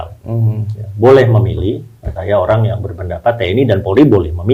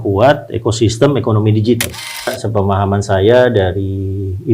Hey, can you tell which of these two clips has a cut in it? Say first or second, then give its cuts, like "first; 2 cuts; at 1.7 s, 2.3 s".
second; 1 cut; at 2.4 s